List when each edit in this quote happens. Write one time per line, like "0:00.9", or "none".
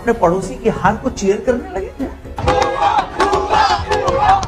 none